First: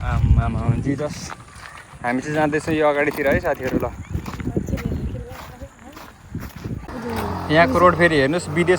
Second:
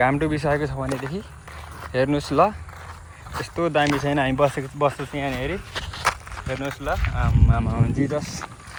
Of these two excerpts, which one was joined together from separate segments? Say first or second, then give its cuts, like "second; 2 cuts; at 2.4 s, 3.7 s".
first; 1 cut; at 7.0 s